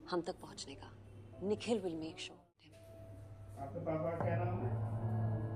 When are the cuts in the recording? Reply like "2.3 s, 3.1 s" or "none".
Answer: 2.5 s